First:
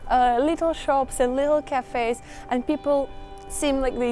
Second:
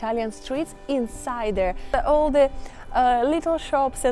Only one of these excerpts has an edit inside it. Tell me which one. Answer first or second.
second